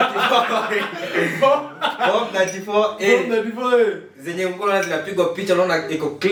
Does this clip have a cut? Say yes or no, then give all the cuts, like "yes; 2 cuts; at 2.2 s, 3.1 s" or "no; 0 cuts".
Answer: no; 0 cuts